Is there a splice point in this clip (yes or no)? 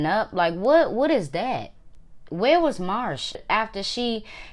yes